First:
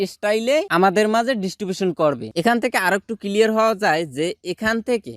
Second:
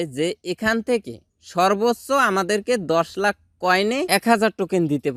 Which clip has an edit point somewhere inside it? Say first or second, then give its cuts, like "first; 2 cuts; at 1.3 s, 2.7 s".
first; 1 cut; at 2.3 s